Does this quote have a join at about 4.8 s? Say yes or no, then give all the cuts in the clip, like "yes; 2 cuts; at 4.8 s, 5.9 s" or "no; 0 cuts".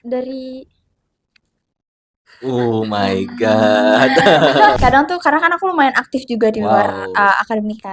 yes; 1 cut; at 4.8 s